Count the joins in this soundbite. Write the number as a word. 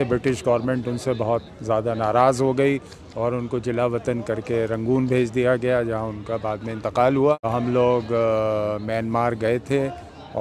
one